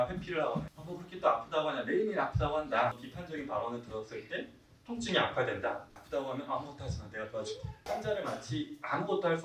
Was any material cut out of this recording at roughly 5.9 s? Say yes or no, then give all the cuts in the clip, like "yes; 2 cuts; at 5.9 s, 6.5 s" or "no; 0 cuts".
yes; 2 cuts; at 3.1 s, 5.9 s